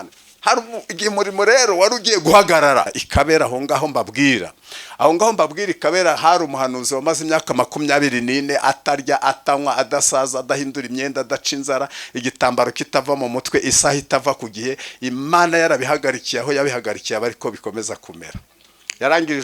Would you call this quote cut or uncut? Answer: cut